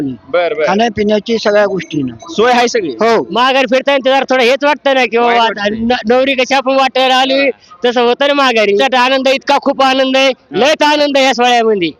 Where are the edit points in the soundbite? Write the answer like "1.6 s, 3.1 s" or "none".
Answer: 3.3 s, 8.8 s